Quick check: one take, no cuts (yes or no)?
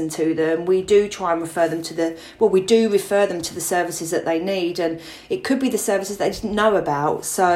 yes